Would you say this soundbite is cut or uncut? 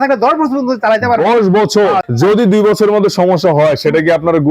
cut